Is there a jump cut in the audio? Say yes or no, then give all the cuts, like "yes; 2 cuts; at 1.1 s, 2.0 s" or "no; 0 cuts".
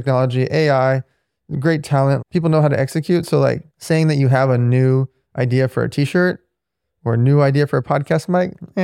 yes; 2 cuts; at 2.2 s, 3.7 s